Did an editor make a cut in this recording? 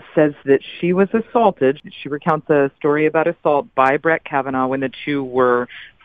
yes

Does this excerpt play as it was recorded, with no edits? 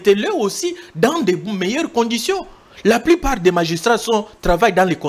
yes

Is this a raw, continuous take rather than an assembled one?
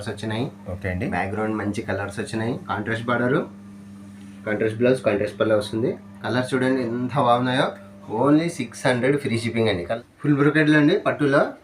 no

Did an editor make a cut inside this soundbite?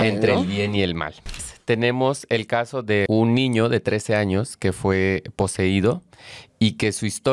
yes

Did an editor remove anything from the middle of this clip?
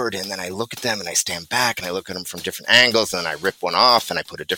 no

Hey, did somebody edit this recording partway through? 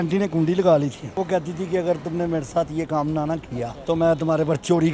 yes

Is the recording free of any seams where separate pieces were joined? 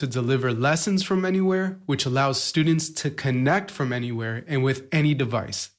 yes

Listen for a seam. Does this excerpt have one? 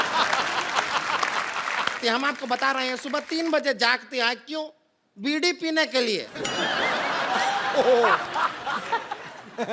yes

